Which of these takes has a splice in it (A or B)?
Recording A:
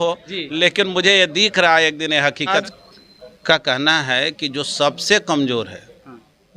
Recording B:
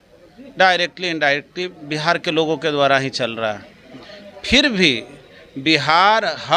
A